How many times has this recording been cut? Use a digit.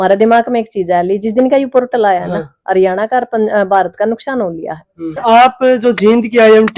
1